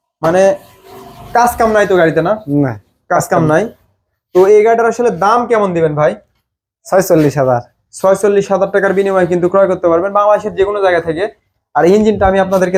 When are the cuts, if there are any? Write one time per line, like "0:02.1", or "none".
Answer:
none